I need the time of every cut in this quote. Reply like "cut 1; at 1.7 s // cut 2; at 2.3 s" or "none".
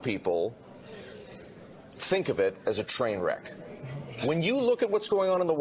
none